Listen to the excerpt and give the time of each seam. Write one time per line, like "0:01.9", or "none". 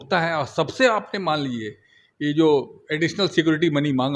none